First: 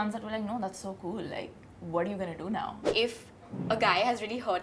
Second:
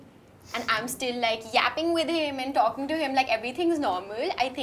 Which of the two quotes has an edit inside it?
first; 1 cut; at 2.9 s

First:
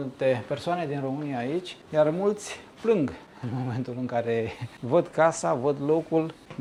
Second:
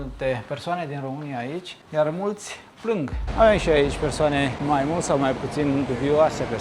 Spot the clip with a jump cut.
second; 2 cuts; at 3.2 s, 4.6 s

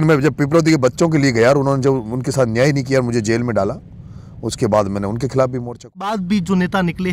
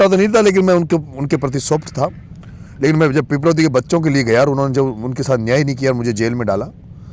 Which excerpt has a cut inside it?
first; 1 cut; at 6.0 s

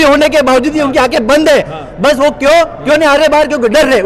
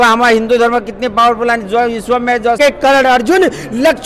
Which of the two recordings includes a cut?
second; 1 cut; at 2.6 s

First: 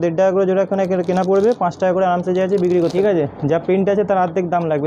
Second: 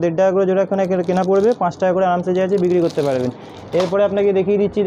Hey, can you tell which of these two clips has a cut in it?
first; 1 cut; at 2.9 s

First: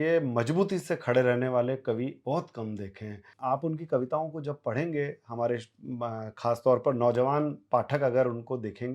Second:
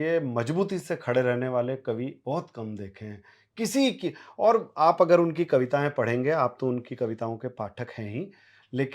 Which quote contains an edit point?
first; 1 cut; at 3.3 s

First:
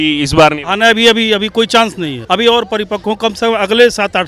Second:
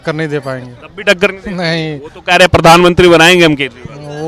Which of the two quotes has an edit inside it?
first; 1 cut; at 2.1 s

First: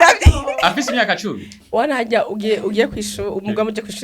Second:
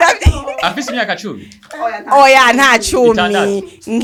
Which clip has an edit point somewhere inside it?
first; 1 cut; at 1.5 s

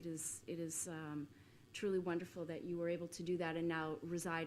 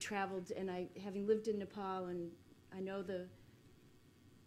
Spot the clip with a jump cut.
first; 1 cut; at 2.1 s

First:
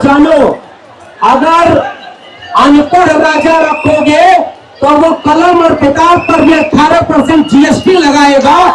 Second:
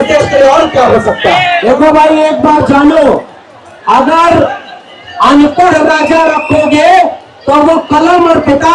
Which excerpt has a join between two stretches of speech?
second; 1 cut; at 1.6 s

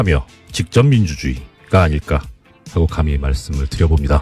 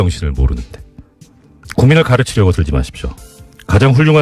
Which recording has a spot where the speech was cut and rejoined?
first; 1 cut; at 1.8 s

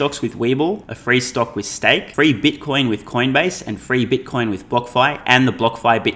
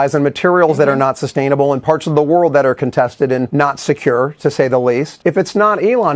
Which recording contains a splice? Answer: first; 2 cuts; at 0.9 s, 2.1 s

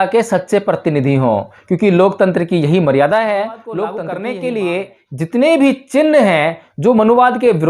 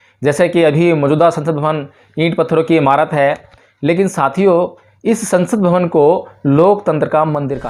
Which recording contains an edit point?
first; 1 cut; at 4.0 s

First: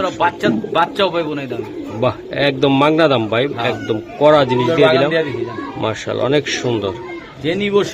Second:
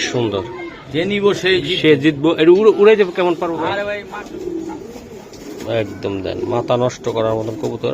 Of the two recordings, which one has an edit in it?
second; 1 cut; at 3.8 s

